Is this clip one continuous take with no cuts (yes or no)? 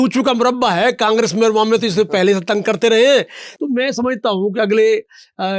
no